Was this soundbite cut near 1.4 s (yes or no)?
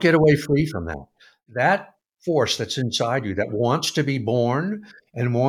yes